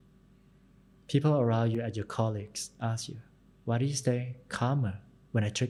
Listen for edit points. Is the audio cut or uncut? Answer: uncut